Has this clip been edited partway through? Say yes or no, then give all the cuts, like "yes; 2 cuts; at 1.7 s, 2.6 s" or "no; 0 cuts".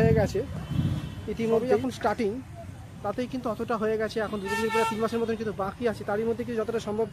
yes; 1 cut; at 1.8 s